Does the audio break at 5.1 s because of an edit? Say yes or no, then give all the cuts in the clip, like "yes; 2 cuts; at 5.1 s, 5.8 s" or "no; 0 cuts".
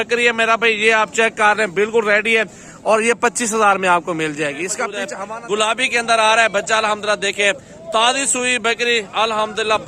yes; 1 cut; at 5.1 s